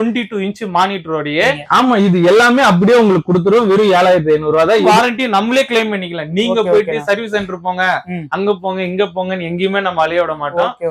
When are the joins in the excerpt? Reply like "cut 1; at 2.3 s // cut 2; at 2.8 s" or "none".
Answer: cut 1; at 1.6 s // cut 2; at 4.9 s